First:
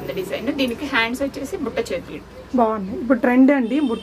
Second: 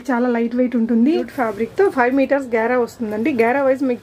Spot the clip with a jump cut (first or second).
second